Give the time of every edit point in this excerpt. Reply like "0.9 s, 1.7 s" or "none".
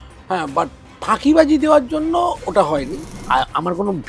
3.1 s